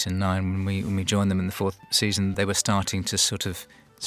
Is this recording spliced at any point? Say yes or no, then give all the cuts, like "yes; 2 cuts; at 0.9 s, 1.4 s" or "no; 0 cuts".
yes; 1 cut; at 2.2 s